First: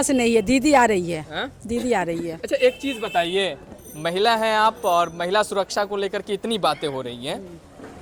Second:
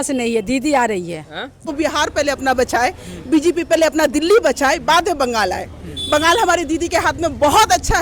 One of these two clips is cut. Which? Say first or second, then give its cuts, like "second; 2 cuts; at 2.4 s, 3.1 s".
second; 1 cut; at 1.7 s